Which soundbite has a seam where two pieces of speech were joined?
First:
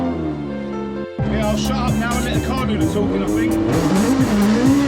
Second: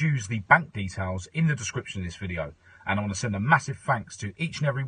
first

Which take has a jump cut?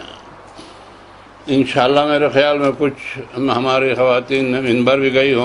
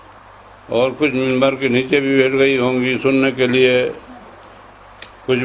second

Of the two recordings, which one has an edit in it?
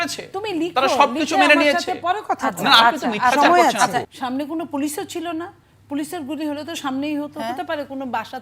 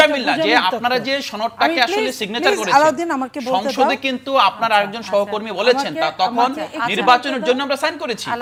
first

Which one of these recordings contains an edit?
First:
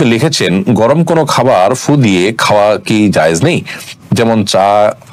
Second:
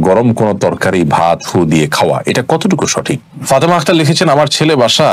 second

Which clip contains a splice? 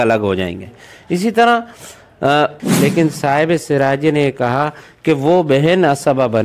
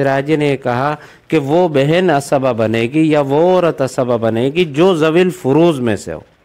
first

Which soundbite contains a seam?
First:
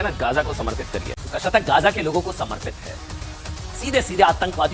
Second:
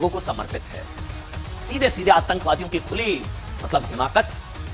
first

